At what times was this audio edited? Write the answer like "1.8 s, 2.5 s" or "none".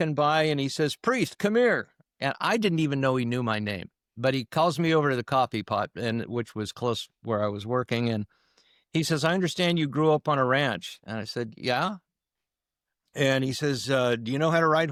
none